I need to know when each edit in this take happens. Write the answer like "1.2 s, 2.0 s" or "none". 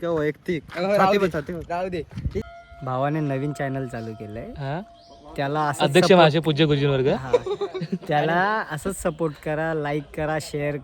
2.5 s